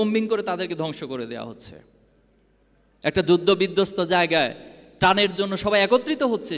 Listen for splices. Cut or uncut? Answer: uncut